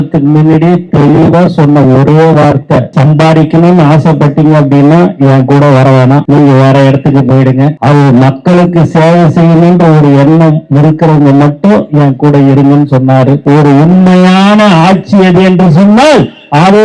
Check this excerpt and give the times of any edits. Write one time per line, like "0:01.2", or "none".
0:02.9
0:06.2
0:07.8
0:13.4